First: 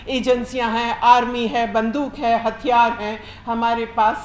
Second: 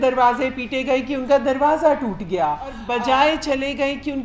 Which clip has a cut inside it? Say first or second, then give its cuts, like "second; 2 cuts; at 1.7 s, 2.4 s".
second; 1 cut; at 2.8 s